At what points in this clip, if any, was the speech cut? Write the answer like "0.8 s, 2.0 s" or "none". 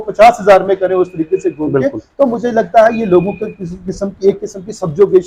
none